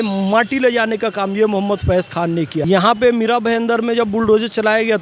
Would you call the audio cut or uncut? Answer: cut